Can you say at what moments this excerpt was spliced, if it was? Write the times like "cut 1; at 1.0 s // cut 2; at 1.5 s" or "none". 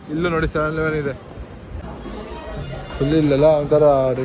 cut 1; at 1.8 s